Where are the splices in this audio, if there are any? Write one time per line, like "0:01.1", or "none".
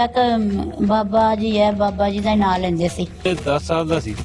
0:03.3